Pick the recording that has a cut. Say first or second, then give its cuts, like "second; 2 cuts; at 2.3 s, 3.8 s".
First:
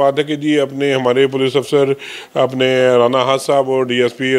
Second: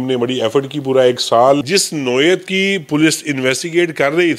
second; 1 cut; at 1.6 s